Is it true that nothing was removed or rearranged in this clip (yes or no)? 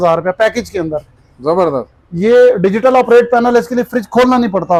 yes